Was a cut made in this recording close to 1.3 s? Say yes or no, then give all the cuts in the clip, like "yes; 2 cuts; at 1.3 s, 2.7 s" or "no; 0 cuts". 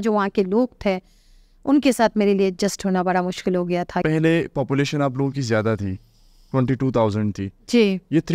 no; 1 cut; at 4.0 s